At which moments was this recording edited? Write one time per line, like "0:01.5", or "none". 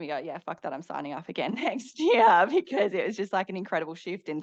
none

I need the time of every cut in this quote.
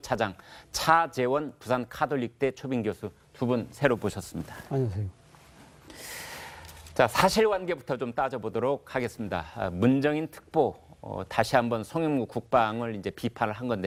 none

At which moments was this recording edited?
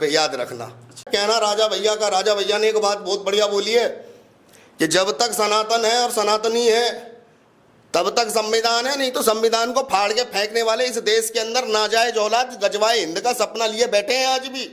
0:01.0

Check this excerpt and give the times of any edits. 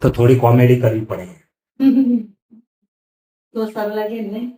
none

